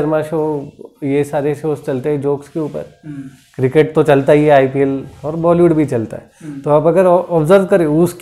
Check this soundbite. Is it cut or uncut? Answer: uncut